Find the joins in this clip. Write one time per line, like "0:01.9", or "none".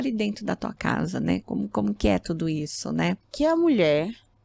0:03.2